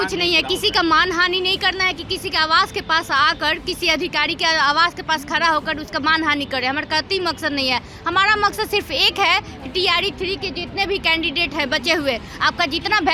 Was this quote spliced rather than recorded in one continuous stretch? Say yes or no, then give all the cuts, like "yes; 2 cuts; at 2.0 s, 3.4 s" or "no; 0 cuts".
no; 0 cuts